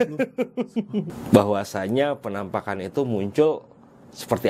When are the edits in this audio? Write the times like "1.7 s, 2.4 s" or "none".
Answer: 1.1 s